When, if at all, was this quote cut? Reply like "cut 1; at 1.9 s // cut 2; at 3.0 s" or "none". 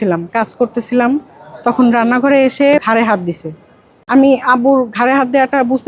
cut 1; at 2.8 s // cut 2; at 4.0 s